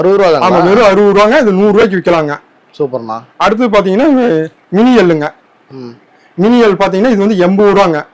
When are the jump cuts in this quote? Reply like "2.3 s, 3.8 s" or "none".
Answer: none

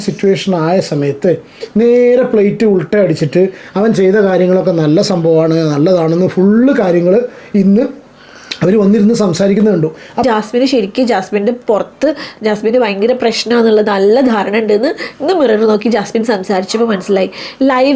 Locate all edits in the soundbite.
10.2 s

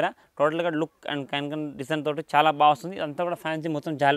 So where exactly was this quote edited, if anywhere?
none

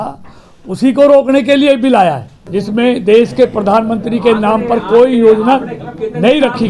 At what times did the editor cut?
2.3 s

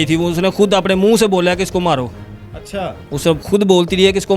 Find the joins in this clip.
none

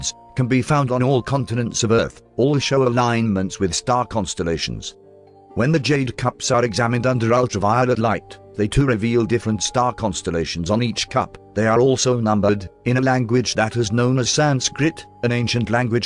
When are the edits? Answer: none

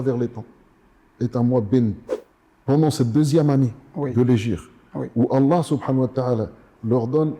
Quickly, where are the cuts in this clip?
2.1 s

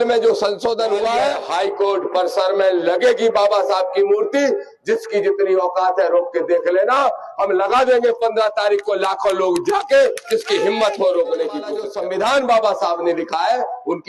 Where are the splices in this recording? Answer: 1.4 s, 11.8 s

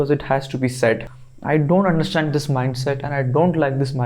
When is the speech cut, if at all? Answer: 1.1 s

